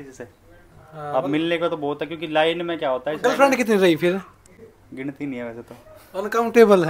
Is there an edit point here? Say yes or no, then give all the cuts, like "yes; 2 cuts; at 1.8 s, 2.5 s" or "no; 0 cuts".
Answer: no; 0 cuts